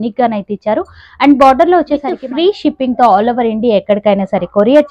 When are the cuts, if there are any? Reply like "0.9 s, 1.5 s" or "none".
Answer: 2.2 s

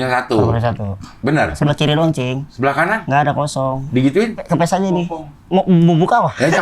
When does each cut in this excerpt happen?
1.6 s, 2.8 s, 4.4 s

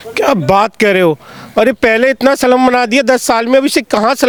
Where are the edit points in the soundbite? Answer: none

